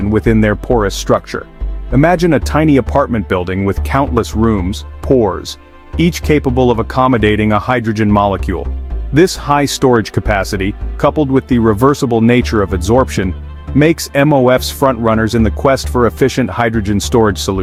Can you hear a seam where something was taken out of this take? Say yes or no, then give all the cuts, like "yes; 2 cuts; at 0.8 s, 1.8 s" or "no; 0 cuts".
no; 0 cuts